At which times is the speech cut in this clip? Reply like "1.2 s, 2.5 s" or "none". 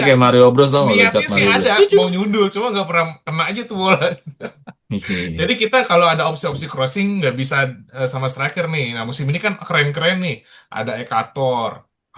none